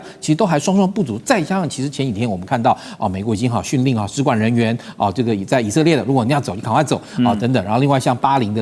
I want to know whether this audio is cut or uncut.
uncut